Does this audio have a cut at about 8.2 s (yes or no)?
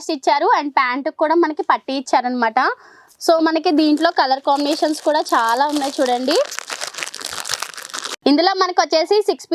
no